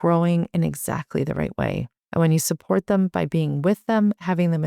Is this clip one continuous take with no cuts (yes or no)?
no